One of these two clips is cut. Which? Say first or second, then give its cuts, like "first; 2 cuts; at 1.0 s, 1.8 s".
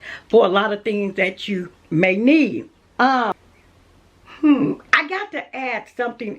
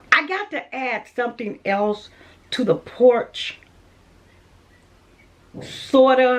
first; 1 cut; at 3.3 s